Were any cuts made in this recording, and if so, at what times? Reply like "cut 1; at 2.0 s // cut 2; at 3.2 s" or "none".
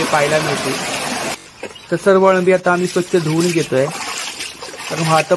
cut 1; at 1.3 s

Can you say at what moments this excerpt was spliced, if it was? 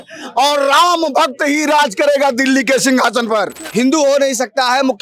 cut 1; at 3.6 s

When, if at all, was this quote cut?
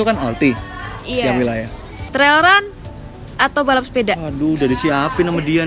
cut 1; at 1.9 s

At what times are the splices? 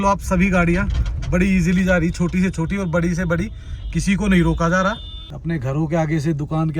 cut 1; at 5.3 s

